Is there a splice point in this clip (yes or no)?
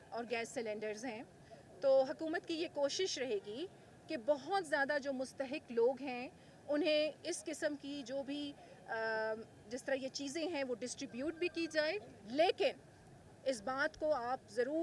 no